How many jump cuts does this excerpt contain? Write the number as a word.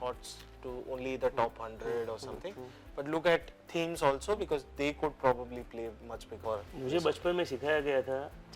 one